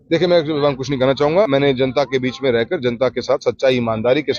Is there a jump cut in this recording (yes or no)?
yes